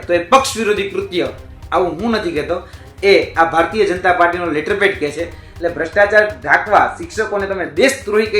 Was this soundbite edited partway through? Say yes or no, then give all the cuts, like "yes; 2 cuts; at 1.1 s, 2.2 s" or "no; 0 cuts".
yes; 1 cut; at 5.4 s